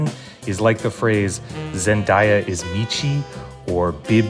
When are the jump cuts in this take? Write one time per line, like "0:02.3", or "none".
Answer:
none